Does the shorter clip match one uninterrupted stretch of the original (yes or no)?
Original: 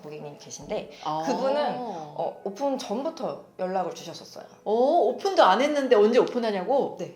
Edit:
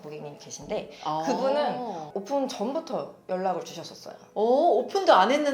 no